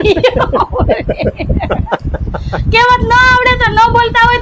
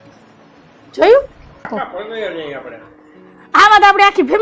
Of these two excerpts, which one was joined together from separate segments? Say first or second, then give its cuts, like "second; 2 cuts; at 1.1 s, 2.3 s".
second; 1 cut; at 1.8 s